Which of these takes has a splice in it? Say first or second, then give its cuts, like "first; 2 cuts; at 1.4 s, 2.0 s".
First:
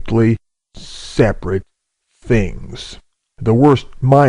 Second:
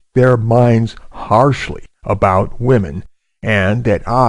second; 1 cut; at 1.7 s